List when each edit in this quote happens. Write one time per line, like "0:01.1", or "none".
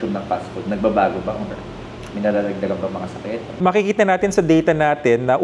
0:03.5